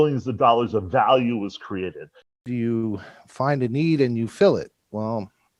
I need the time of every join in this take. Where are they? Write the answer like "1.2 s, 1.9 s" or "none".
2.4 s